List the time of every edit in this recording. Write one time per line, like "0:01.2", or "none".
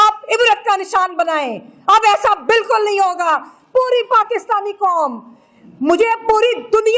none